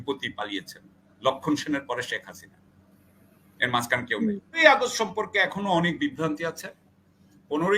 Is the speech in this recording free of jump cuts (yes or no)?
no